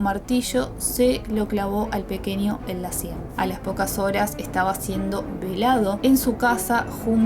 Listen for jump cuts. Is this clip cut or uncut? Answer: cut